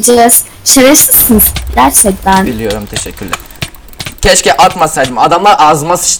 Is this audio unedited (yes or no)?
yes